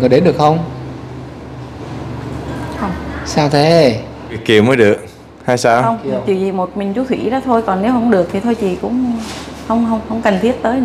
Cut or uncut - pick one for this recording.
cut